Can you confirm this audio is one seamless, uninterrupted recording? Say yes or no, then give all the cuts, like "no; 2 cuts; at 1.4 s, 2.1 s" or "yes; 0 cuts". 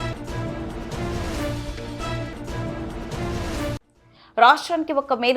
yes; 0 cuts